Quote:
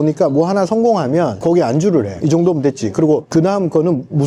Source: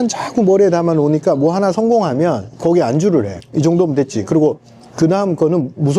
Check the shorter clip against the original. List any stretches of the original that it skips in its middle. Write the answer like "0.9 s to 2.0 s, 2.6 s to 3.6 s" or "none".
2.4 s to 2.6 s, 3.3 s to 3.5 s, 4.6 s to 4.9 s